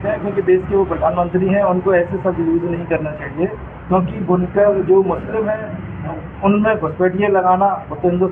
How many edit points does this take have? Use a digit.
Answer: 0